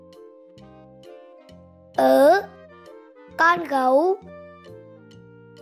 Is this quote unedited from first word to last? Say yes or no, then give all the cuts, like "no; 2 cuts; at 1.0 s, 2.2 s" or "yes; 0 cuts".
no; 2 cuts; at 1.3 s, 4.2 s